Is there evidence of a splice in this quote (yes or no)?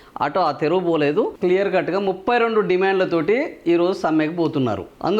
no